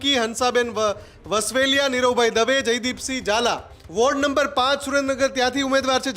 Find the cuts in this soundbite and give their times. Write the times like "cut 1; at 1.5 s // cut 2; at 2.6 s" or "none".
cut 1; at 3.7 s